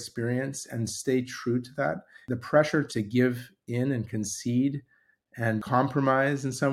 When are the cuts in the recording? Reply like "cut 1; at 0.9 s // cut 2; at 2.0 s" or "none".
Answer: cut 1; at 2.1 s // cut 2; at 2.9 s // cut 3; at 5.6 s